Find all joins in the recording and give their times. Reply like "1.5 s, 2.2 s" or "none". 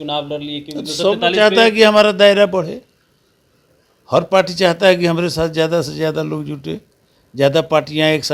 none